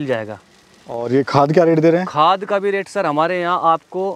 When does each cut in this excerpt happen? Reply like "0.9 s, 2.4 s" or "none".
1.0 s